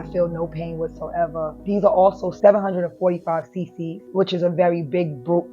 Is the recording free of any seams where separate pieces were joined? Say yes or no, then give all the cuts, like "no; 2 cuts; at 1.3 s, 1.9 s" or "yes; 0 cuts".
no; 3 cuts; at 1.6 s, 2.3 s, 4.0 s